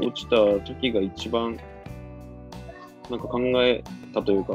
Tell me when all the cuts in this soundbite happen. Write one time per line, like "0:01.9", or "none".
none